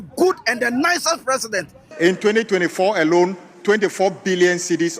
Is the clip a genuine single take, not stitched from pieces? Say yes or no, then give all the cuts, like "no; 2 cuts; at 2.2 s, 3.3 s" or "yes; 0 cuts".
no; 1 cut; at 1.8 s